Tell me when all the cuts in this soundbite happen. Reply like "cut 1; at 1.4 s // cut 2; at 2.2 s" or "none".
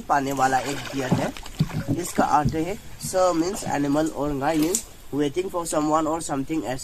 cut 1; at 1.5 s